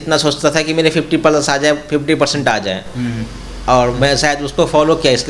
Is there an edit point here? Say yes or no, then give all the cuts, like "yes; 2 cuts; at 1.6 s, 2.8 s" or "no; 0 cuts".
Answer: no; 0 cuts